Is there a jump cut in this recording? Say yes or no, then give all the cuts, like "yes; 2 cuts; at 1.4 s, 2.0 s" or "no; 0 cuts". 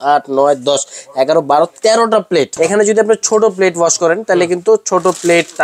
yes; 1 cut; at 2.5 s